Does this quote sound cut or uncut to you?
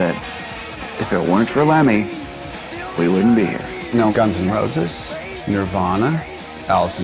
cut